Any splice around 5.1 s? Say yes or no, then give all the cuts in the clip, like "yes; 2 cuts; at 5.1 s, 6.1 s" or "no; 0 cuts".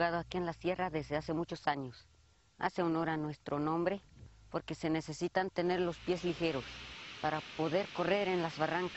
yes; 1 cut; at 5.1 s